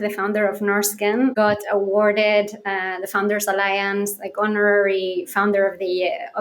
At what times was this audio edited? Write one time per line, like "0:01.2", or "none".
0:01.3